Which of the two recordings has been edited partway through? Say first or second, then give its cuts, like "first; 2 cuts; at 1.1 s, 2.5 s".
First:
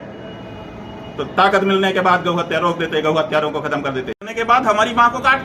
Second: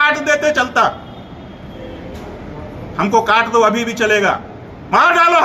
first; 1 cut; at 4.1 s